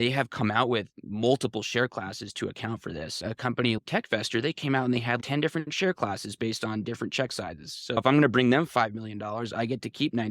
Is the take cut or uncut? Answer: cut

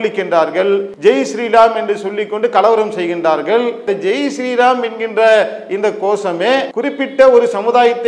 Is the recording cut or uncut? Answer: cut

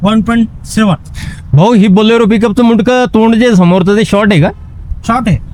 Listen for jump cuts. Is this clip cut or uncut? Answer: uncut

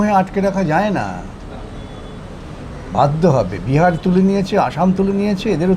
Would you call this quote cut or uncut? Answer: uncut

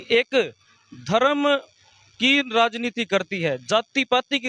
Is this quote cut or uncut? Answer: uncut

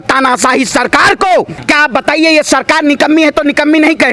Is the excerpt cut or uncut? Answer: cut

